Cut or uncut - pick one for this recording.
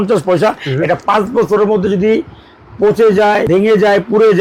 cut